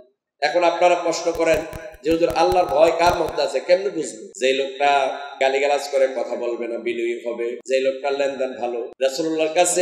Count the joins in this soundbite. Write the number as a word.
four